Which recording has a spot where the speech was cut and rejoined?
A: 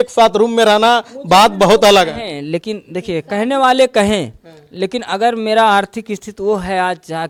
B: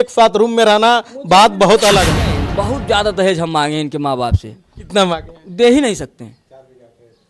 B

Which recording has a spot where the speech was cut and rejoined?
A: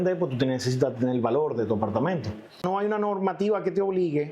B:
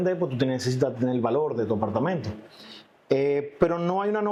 A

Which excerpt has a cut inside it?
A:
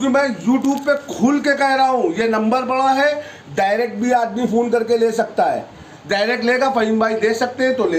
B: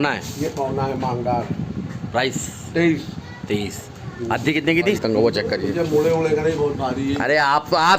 B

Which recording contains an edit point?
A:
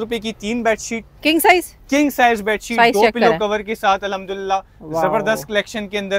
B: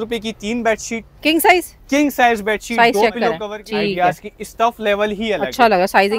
B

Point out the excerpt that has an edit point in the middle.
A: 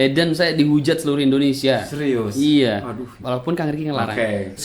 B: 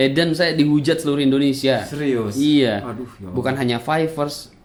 A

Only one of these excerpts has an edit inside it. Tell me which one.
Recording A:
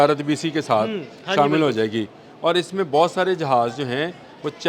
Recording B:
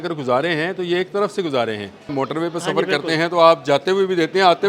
B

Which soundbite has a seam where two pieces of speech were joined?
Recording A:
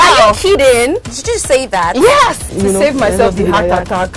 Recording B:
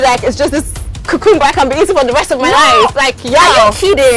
A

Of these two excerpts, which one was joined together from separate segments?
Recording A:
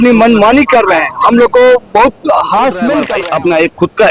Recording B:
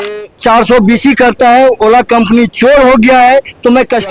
A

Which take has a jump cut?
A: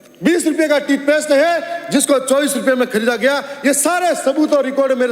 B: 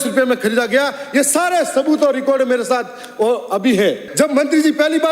B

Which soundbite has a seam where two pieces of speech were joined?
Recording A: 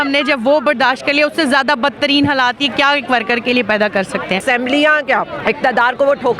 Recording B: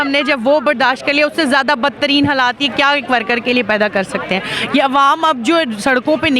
A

